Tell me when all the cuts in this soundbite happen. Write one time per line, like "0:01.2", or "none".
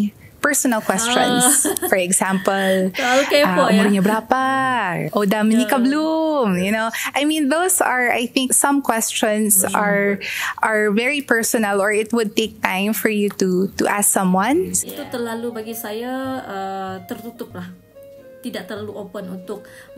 0:14.9